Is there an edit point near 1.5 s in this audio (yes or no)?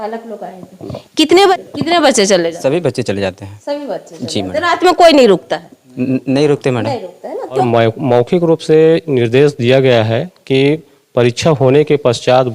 yes